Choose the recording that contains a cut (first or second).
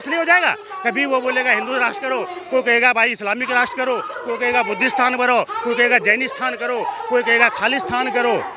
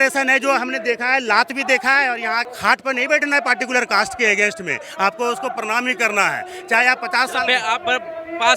second